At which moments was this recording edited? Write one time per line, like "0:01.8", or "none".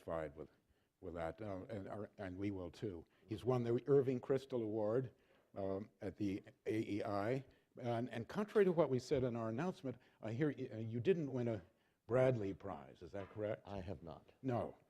0:02.7